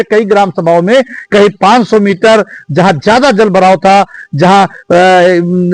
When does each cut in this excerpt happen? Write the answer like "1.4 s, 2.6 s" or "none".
none